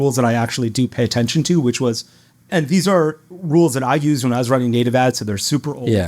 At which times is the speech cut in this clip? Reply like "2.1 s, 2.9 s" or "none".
none